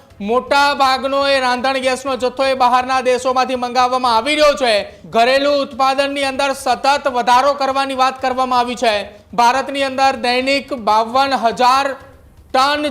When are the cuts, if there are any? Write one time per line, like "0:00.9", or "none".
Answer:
0:05.0
0:09.2